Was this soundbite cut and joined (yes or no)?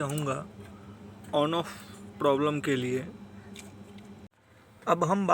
yes